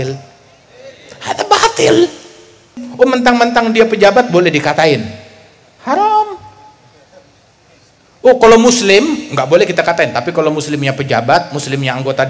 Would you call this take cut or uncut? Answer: cut